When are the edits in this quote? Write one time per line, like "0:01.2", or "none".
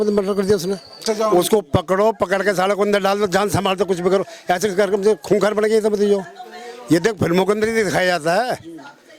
0:01.1